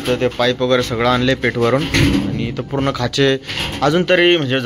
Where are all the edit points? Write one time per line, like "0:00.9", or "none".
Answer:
none

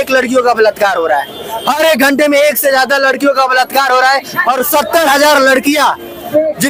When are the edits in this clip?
none

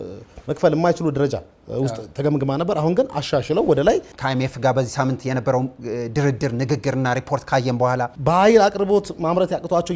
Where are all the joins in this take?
0:04.1
0:08.1

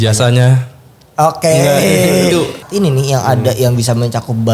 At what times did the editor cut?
0:02.7

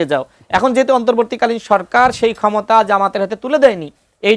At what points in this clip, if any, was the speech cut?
none

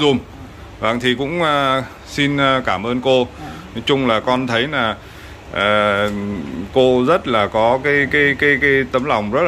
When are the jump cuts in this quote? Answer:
none

